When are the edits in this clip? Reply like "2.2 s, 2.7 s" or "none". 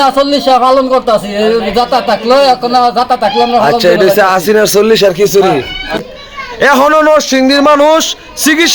6.0 s